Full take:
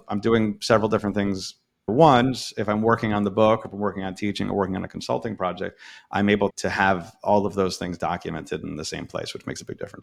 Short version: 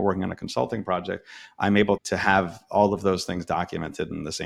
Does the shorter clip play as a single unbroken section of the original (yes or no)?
yes